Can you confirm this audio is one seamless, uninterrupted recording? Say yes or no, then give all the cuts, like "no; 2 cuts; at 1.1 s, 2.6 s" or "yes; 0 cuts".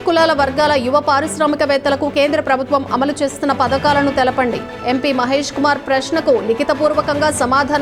yes; 0 cuts